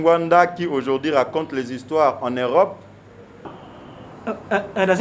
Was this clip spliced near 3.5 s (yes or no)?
yes